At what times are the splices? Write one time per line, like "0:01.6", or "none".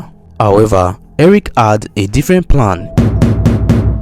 0:02.8